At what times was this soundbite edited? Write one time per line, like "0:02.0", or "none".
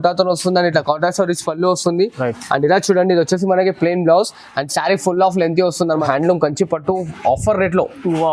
0:06.0